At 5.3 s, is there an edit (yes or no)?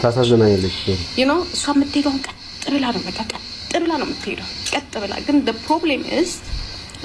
no